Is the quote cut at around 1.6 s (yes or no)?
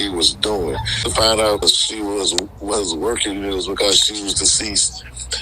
yes